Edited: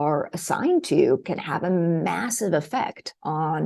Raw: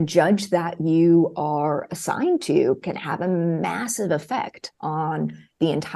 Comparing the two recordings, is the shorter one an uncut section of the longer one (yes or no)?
yes